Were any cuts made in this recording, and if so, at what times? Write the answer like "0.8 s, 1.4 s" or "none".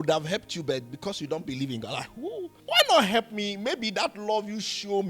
2.5 s